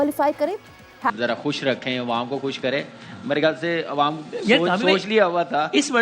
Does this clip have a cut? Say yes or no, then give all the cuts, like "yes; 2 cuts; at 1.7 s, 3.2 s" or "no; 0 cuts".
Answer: yes; 1 cut; at 1.1 s